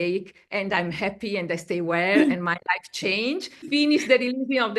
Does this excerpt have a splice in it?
yes; 1 cut; at 3.7 s

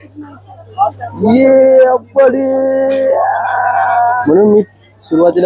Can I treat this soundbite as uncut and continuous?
yes; 0 cuts

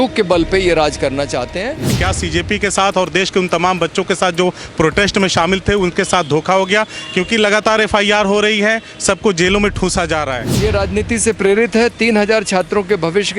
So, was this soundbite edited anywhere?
yes; 2 cuts; at 2.0 s, 10.4 s

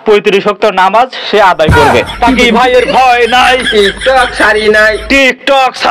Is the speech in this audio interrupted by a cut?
yes; 1 cut; at 2.1 s

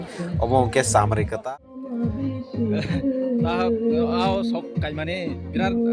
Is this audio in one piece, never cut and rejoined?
no; 1 cut; at 1.3 s

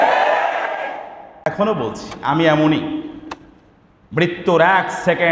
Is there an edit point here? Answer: yes; 1 cut; at 1.4 s

